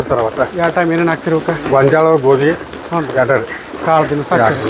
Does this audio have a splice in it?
no; 0 cuts

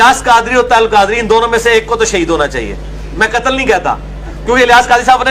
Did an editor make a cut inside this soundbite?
no; 0 cuts

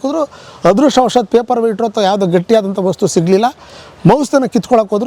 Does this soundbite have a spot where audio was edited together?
no; 0 cuts

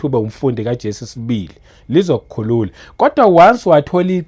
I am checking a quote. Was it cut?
no; 0 cuts

